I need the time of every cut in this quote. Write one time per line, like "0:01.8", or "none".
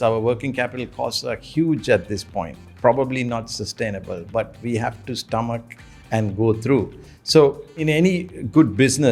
0:07.8